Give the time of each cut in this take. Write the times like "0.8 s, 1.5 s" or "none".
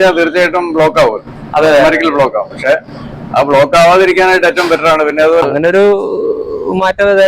5.5 s